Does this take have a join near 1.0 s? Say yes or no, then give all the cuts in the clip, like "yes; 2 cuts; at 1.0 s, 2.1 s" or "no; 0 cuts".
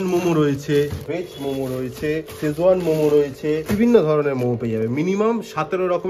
yes; 3 cuts; at 1.0 s, 2.3 s, 3.7 s